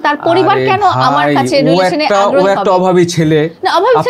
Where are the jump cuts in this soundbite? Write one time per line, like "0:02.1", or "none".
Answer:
none